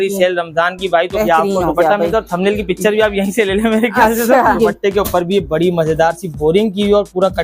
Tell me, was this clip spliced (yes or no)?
yes